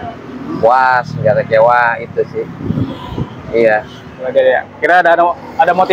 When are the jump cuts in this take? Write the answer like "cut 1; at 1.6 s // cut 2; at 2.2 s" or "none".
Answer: none